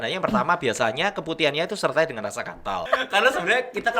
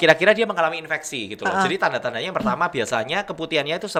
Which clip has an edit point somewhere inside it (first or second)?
first